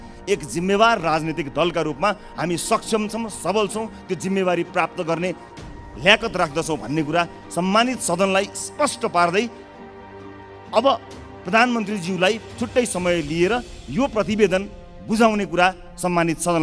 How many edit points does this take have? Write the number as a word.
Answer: zero